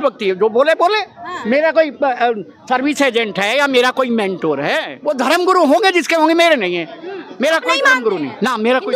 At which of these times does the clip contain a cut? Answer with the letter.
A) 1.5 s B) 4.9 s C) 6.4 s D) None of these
B